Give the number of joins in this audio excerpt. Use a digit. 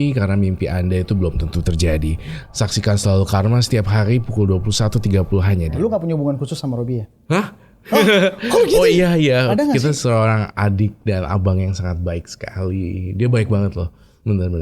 1